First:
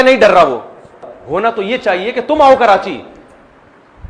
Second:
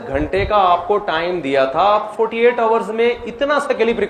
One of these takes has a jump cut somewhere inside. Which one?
first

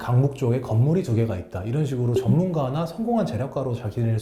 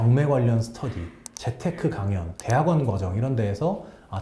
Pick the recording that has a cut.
second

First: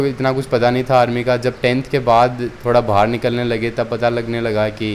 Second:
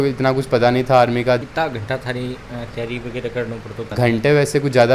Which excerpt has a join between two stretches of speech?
second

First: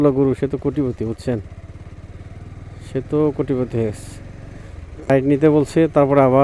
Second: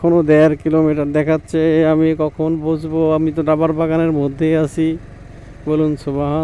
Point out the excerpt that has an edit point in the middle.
first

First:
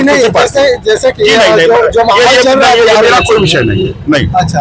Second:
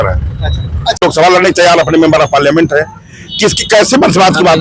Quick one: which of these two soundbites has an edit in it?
second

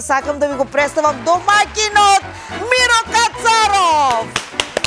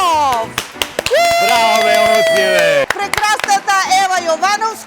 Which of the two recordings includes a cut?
second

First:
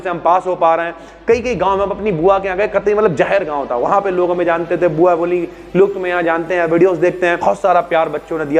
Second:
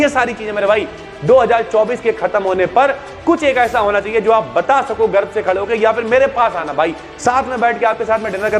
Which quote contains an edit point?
first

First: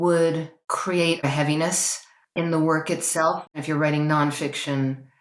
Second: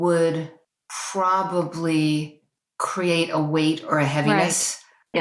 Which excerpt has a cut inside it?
first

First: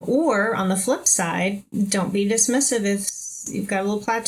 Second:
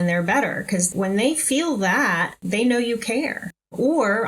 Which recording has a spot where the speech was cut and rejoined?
second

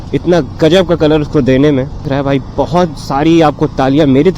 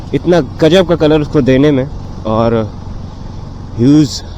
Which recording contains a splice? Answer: first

